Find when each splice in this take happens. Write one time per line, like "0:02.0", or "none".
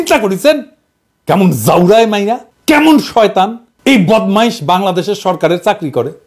0:02.5
0:03.6